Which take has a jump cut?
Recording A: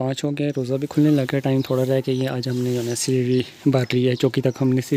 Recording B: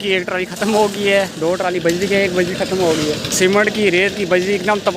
B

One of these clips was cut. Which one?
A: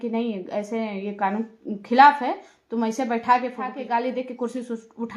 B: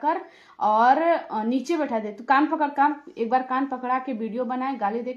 A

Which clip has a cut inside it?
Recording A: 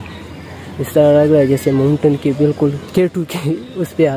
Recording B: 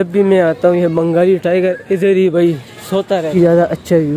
B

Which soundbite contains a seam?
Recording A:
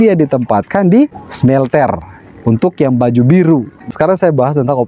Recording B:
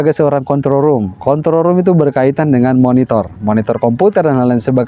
A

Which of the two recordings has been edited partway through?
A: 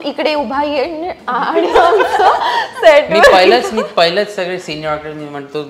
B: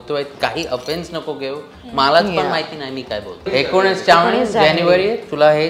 B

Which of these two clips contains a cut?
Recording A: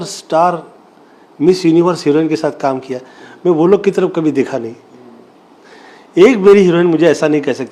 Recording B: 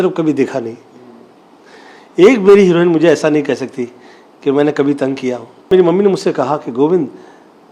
B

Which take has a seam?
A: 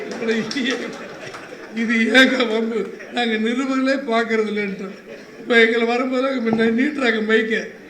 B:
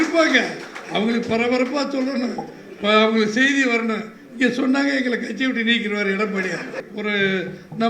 B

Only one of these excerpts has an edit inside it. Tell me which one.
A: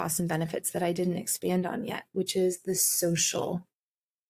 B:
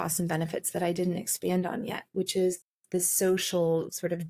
B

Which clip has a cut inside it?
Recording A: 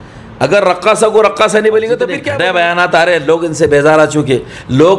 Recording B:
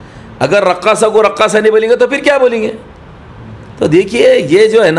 A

